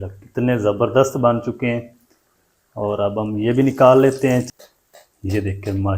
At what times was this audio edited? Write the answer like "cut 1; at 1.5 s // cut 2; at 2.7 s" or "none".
cut 1; at 4.5 s